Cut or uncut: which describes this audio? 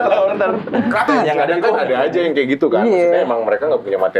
cut